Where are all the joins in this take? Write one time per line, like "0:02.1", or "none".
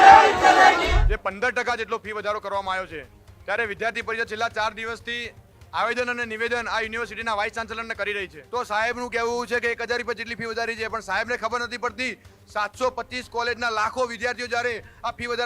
0:00.9
0:08.4